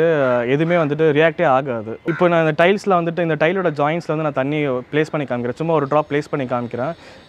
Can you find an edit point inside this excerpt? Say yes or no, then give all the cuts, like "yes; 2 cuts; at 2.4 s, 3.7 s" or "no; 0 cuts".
yes; 1 cut; at 1.9 s